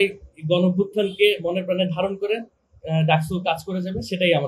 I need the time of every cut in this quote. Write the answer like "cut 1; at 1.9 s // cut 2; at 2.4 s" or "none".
none